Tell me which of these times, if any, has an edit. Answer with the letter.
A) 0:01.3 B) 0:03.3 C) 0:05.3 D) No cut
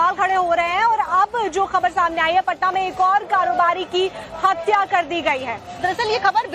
A